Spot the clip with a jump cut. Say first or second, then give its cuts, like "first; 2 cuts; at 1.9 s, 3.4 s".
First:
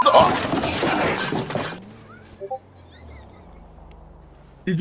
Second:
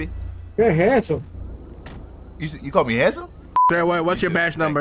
second; 1 cut; at 3.6 s